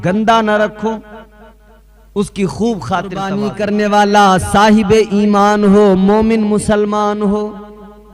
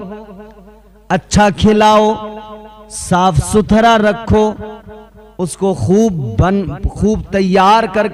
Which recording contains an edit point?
first; 1 cut; at 3.6 s

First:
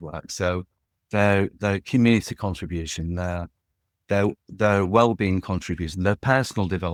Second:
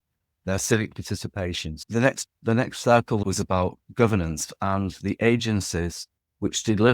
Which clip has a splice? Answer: second; 2 cuts; at 1.7 s, 3.2 s

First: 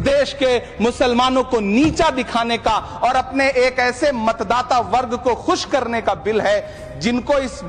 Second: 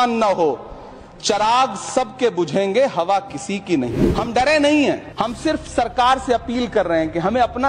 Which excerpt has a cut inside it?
second; 2 cuts; at 4.0 s, 5.1 s

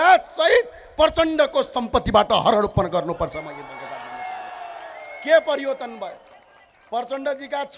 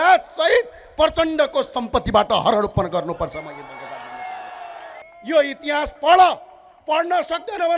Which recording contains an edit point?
second; 1 cut; at 5.0 s

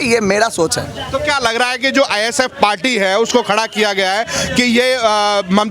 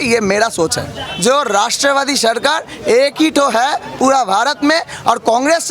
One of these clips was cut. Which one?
second; 1 cut; at 1.1 s

